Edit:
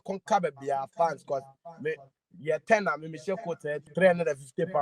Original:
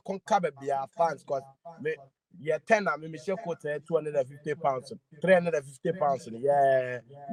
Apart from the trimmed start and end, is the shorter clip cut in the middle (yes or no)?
yes